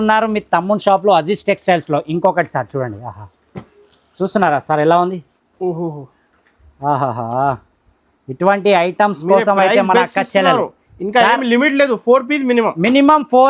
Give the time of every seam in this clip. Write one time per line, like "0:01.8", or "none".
none